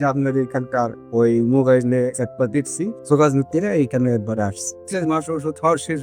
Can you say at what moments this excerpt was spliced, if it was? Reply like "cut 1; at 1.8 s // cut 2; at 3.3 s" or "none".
cut 1; at 3.0 s // cut 2; at 4.8 s